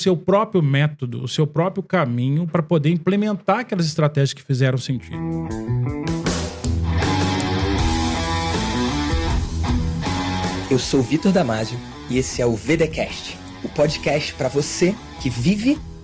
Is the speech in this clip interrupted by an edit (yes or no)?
yes